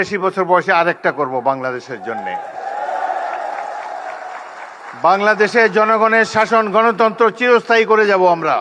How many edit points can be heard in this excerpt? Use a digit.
1